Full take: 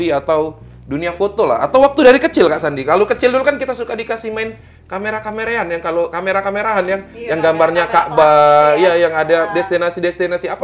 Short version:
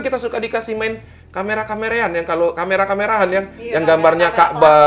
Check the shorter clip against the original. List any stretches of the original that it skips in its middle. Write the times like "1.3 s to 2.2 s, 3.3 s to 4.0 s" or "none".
none

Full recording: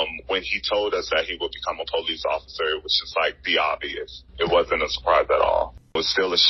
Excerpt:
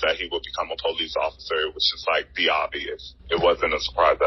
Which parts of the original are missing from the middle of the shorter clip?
none

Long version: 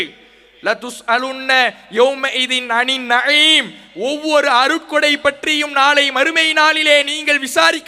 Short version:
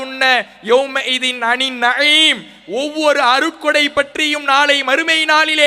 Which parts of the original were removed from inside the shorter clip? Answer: none

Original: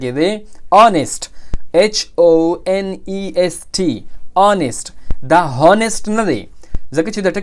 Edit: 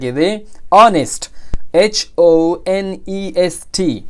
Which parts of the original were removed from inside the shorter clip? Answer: none

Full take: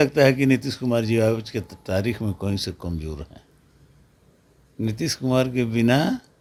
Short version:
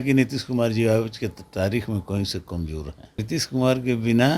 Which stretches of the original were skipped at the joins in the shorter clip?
3.5 s to 4.9 s

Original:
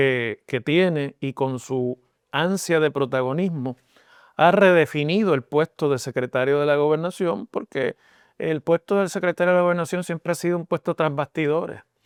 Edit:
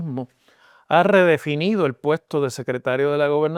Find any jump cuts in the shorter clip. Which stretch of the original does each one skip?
none

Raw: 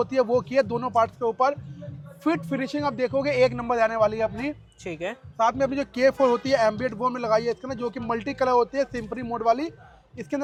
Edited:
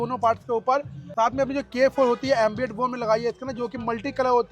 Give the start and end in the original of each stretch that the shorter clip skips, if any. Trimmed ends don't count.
1.7 s to 5.2 s

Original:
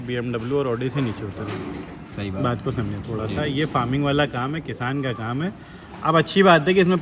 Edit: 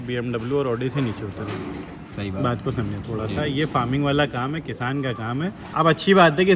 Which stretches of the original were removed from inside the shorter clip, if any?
5.6 s to 5.9 s

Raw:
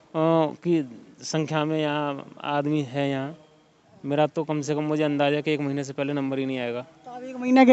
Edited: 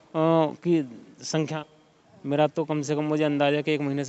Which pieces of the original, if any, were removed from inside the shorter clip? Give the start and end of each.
1.5 s to 3.3 s

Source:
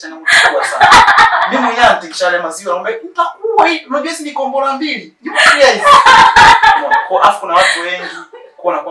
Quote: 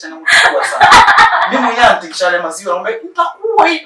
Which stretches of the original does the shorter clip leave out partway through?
none

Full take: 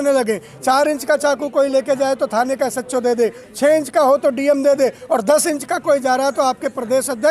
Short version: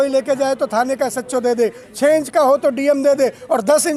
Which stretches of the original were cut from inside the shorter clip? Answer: none

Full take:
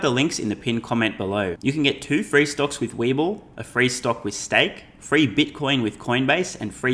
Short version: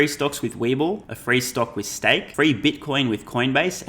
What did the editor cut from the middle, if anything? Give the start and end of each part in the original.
3.5 s to 3.6 s, 4.8 s to 5.0 s

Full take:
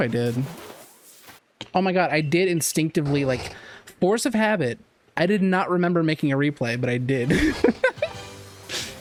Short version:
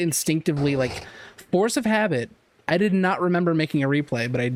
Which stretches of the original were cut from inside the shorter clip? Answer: none

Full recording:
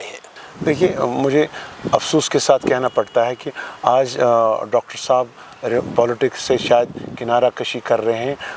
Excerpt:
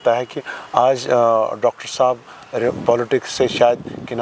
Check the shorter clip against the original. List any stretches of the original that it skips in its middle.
none

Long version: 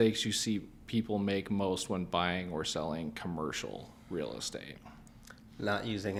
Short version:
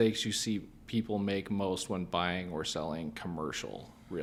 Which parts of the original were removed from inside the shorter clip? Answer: none

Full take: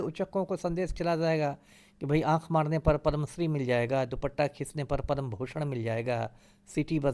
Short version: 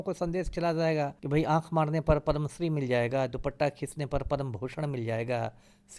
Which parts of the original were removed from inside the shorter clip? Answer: 1.6 s to 2.0 s

